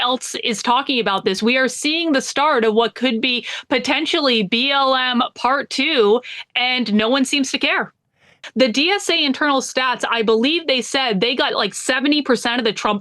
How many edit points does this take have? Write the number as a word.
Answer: one